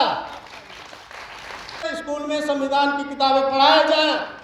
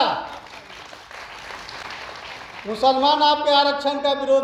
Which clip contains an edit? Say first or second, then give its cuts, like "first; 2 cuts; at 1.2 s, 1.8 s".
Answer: first; 1 cut; at 1.9 s